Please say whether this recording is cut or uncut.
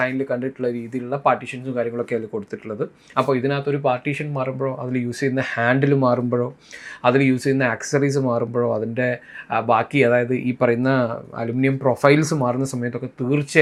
uncut